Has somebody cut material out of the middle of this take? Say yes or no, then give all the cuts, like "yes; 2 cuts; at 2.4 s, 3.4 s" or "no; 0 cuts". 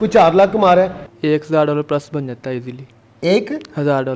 yes; 1 cut; at 1.1 s